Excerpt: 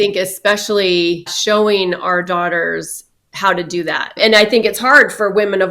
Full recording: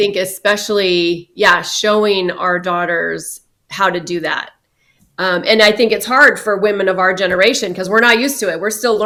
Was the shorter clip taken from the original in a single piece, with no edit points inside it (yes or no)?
no